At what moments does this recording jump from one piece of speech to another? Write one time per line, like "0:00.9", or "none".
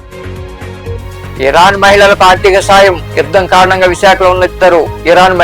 0:01.3